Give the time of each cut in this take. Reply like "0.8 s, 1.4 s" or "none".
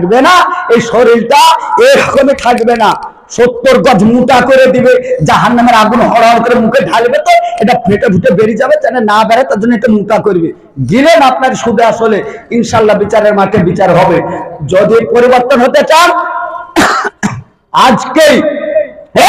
none